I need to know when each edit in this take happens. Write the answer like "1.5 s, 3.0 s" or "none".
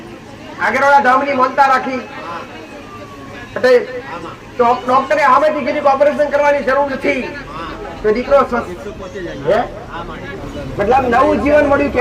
10.4 s